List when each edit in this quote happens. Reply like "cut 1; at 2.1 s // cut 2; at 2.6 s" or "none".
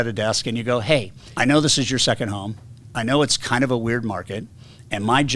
cut 1; at 1.2 s